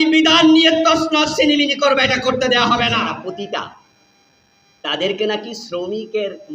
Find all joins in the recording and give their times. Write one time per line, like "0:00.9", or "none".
0:03.2